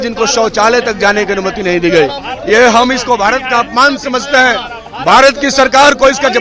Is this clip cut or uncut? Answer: uncut